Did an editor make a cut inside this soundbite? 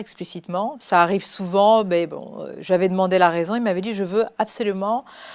no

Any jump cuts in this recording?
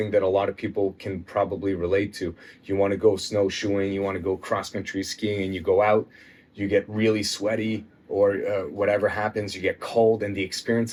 no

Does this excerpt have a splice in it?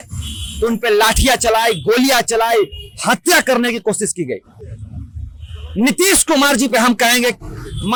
no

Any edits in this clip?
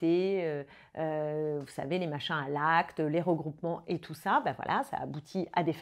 no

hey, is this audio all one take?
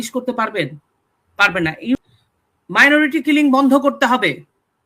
no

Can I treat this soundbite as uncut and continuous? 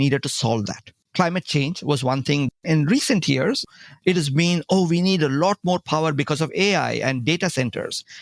no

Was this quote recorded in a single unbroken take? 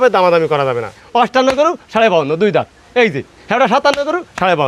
no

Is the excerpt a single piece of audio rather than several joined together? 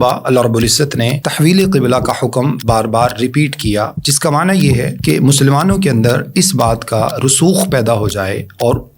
no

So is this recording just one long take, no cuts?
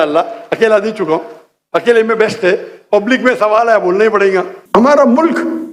no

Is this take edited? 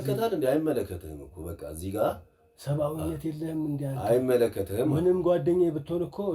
no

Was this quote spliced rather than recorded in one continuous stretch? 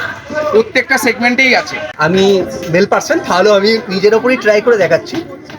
yes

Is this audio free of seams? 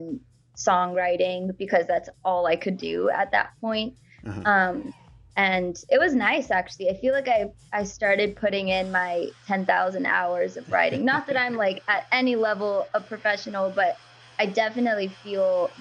yes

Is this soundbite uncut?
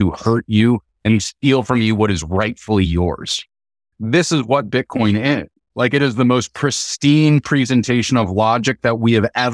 no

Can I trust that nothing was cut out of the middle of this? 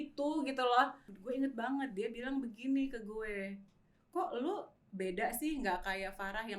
no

